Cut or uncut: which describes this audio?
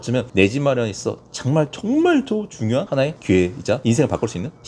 uncut